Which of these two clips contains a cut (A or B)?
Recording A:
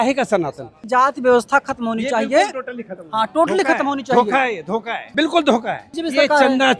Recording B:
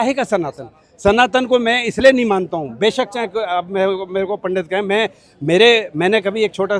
A